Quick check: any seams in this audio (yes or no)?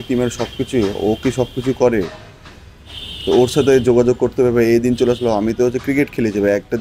no